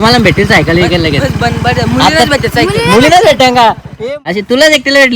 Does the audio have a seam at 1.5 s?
no; 1 cut; at 3.9 s

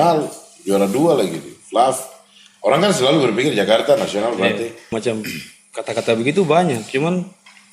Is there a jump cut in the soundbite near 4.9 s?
yes; 1 cut; at 4.9 s

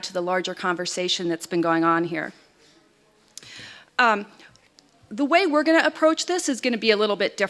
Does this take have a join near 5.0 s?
no; 1 cut; at 1.2 s

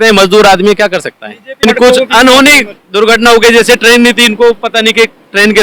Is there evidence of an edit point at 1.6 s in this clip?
yes; 1 cut; at 1.6 s

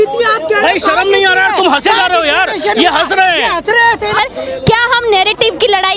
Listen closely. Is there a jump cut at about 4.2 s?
yes; 1 cut; at 4.2 s

